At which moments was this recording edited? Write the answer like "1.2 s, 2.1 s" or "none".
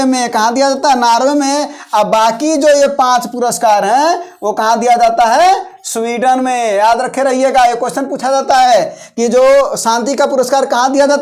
none